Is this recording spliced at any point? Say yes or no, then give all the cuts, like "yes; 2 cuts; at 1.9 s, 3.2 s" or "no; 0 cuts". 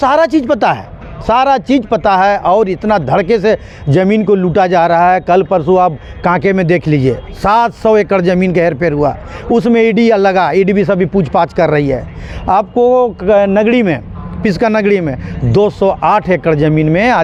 no; 0 cuts